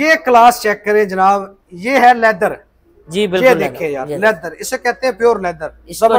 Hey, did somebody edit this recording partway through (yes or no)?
no